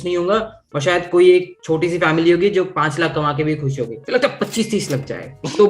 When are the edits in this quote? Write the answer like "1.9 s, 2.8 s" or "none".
3.9 s